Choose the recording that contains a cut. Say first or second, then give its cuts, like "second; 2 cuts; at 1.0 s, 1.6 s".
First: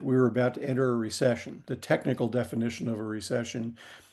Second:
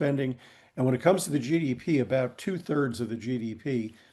first; 1 cut; at 1.6 s